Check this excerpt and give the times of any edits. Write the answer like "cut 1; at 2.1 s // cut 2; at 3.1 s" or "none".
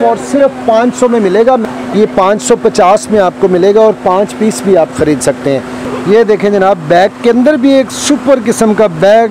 cut 1; at 1.6 s // cut 2; at 5.8 s

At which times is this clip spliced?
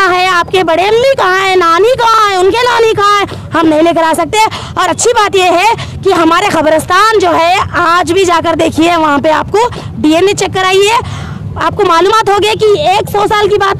none

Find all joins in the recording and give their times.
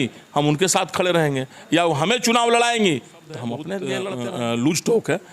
cut 1; at 4.1 s

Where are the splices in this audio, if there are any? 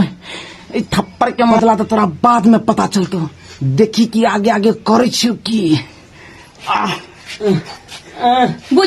cut 1; at 1.6 s

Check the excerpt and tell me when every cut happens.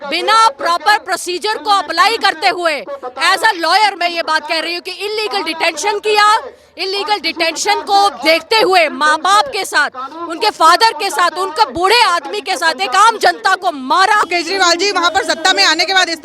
cut 1; at 14.3 s

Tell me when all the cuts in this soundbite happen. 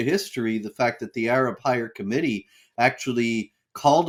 none

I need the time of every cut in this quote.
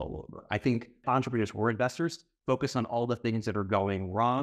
cut 1; at 1.0 s

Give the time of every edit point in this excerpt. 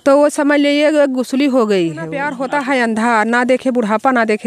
cut 1; at 2.3 s

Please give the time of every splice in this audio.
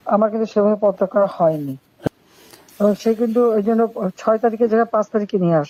cut 1; at 1.8 s

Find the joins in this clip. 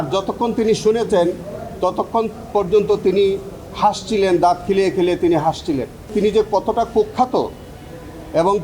cut 1; at 6.1 s

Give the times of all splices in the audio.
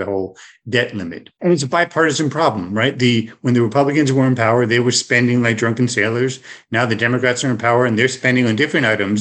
cut 1; at 1.3 s

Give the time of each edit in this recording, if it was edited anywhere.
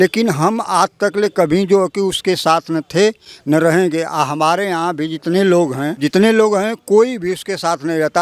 none

